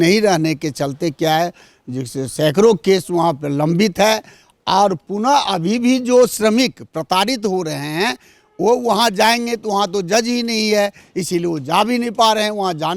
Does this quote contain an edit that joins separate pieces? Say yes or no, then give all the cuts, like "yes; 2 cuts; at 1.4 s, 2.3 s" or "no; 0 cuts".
no; 0 cuts